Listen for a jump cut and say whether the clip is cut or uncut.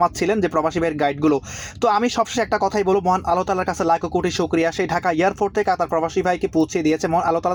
uncut